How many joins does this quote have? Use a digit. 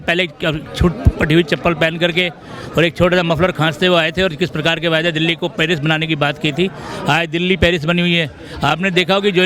0